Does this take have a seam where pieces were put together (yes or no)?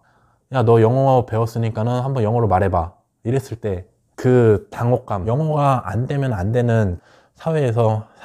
yes